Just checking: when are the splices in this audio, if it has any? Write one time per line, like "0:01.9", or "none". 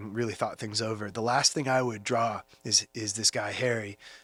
none

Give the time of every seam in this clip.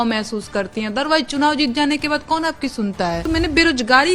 0:03.2

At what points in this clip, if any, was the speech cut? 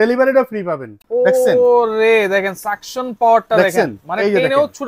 0:00.9

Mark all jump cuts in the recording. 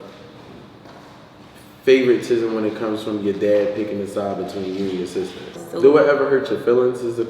0:05.6

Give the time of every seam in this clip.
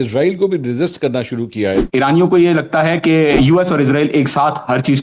0:01.8
0:03.4

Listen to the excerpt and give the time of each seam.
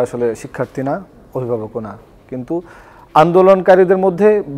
none

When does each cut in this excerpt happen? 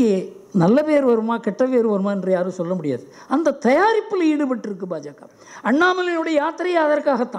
none

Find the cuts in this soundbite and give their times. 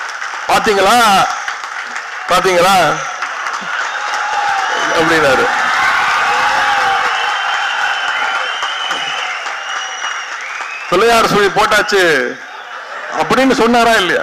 none

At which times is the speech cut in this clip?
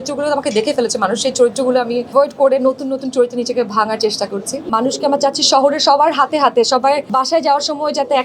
0:02.1
0:04.7
0:07.0

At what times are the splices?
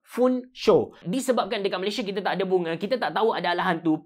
0:01.0

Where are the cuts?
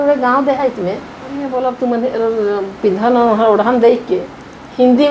0:01.5

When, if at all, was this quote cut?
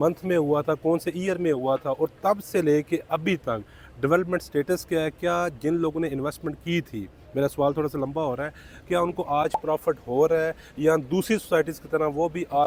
none

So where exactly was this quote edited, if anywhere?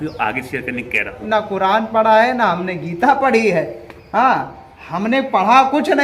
0:01.2

